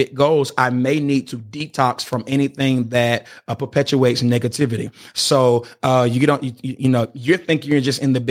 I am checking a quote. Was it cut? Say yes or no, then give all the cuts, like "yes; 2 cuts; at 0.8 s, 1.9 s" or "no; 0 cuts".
no; 0 cuts